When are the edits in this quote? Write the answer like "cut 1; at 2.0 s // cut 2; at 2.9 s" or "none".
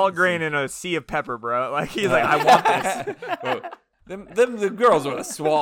cut 1; at 4.0 s